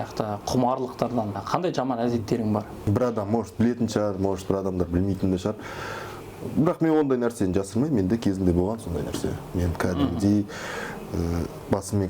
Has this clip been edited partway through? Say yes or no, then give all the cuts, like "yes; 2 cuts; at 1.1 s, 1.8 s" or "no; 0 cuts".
yes; 2 cuts; at 1.4 s, 2.7 s